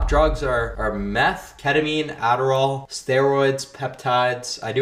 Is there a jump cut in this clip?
no; 0 cuts

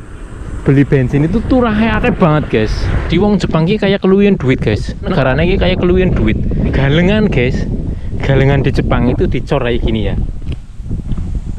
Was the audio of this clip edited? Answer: yes; 3 cuts; at 3.0 s, 5.1 s, 6.7 s

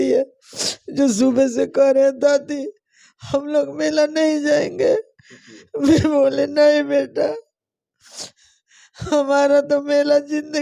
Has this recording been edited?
no; 0 cuts

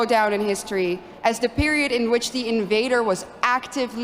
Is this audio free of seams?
yes; 0 cuts

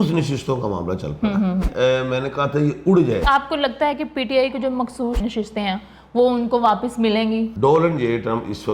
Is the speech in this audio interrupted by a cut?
yes; 4 cuts; at 1.7 s, 3.2 s, 5.2 s, 7.5 s

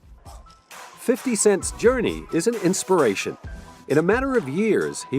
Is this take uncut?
no; 1 cut; at 3.9 s

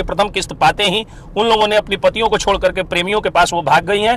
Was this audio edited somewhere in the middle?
no; 0 cuts

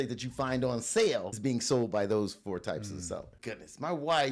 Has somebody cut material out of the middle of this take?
yes; 2 cuts; at 1.3 s, 3.3 s

